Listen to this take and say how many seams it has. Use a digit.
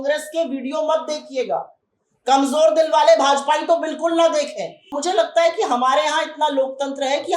1